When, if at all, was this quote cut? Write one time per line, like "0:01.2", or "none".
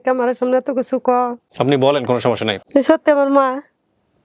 0:01.4
0:02.6